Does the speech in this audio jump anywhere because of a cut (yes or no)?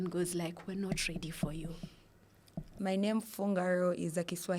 yes